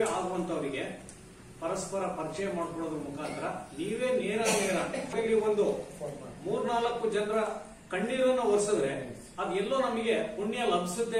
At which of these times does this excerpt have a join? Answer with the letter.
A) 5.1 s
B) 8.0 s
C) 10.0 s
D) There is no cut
A